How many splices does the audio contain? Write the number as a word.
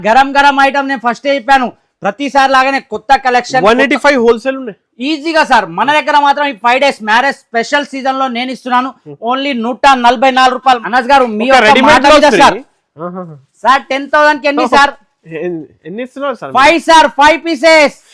one